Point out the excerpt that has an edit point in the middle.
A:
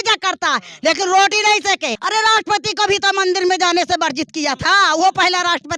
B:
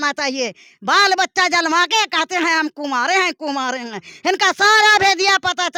A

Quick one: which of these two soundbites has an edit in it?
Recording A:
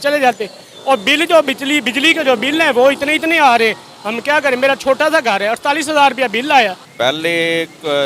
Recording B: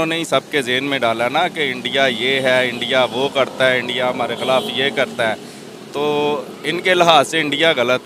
A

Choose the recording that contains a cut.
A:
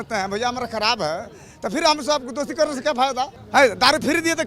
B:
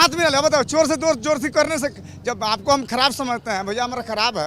A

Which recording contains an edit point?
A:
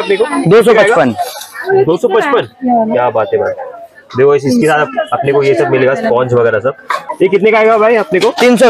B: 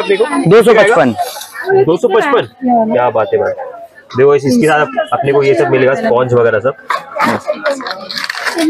A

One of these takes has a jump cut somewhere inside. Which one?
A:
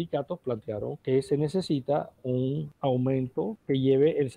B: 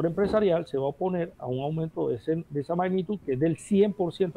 A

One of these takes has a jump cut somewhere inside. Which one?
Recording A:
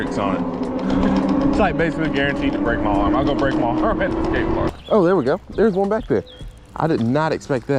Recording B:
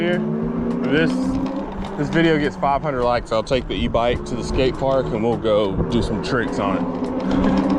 A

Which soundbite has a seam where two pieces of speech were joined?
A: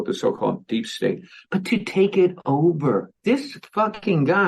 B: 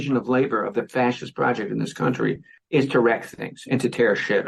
A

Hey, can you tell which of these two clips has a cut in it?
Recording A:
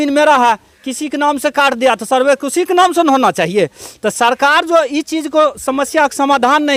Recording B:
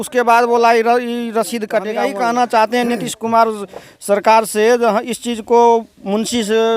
B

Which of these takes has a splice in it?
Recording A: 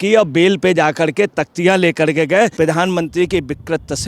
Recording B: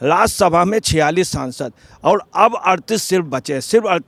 A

